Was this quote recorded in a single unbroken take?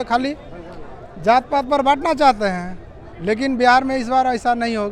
yes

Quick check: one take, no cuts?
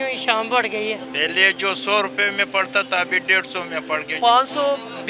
no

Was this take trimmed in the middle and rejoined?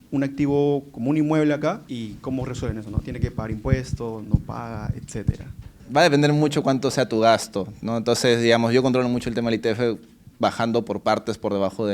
yes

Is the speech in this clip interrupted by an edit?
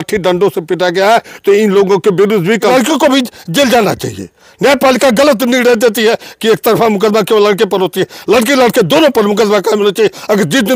yes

